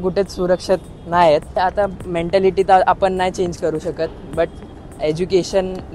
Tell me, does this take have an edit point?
yes; 1 cut; at 1.6 s

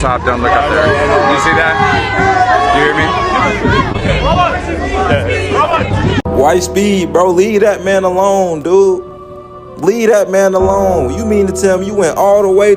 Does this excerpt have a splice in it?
yes; 1 cut; at 6.2 s

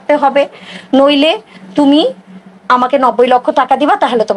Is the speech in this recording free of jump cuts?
yes; 0 cuts

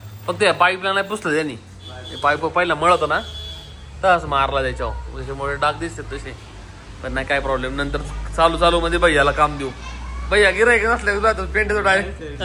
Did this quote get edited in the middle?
no; 0 cuts

